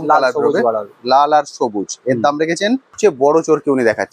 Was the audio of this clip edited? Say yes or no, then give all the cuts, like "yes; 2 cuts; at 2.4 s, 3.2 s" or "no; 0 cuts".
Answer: yes; 1 cut; at 2.9 s